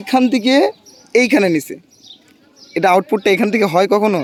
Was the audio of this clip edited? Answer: no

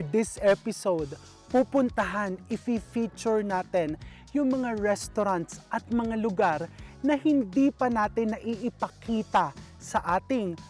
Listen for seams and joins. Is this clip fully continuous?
yes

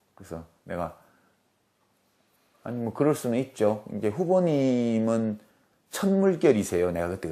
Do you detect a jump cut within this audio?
yes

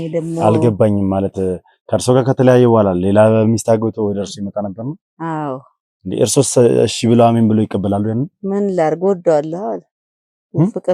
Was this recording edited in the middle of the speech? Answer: no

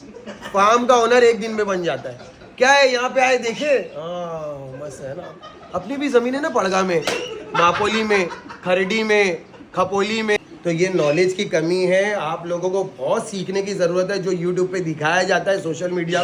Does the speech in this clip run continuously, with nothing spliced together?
no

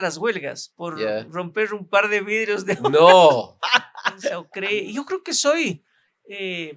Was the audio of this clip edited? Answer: yes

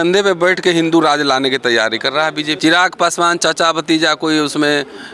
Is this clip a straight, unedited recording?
no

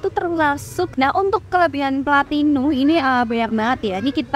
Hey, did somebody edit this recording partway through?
yes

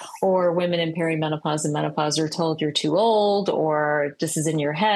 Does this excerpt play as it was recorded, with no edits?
yes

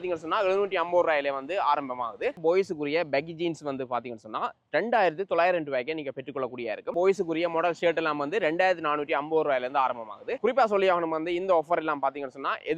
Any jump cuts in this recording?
yes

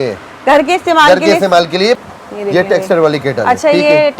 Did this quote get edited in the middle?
yes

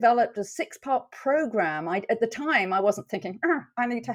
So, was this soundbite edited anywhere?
no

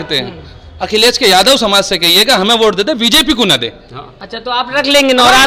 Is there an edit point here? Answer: no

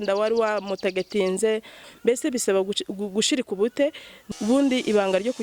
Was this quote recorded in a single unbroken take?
no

